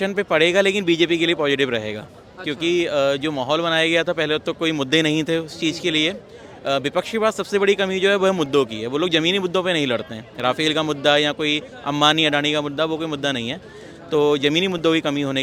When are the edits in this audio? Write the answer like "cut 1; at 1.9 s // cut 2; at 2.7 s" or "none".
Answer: none